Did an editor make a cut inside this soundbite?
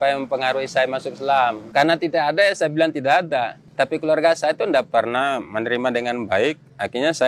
yes; 2 cuts; at 1.6 s, 3.6 s

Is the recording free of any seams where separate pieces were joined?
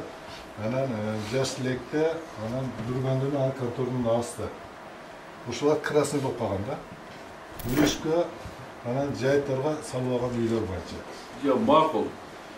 no; 1 cut; at 7.5 s

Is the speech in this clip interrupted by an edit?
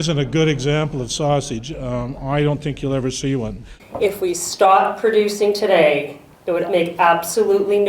yes; 1 cut; at 3.7 s

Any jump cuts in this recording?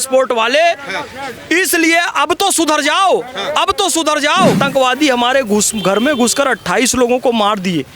yes; 1 cut; at 4.6 s

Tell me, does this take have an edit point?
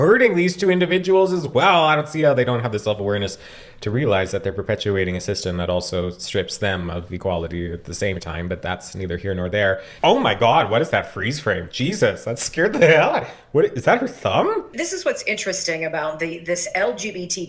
yes; 2 cuts; at 9.9 s, 14.7 s

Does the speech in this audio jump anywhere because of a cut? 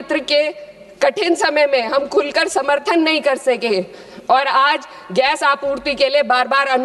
no; 0 cuts

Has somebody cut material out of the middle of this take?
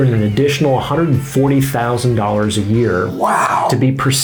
no; 0 cuts

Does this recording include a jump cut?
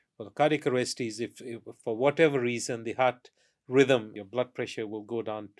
yes; 1 cut; at 4.2 s

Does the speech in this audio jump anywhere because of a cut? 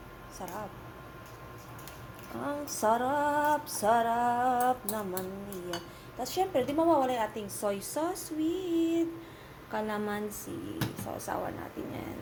no; 0 cuts

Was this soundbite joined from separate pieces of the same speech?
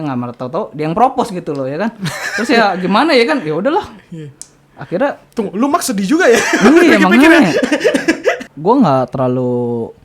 yes; 1 cut; at 8.5 s

